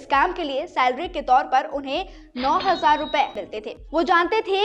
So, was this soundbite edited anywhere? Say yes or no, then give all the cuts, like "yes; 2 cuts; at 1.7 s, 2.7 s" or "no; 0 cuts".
yes; 1 cut; at 3.4 s